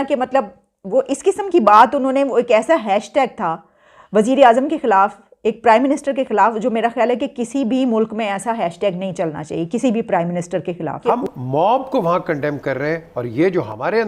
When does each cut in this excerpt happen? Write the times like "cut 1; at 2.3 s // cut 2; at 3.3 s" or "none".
cut 1; at 11.1 s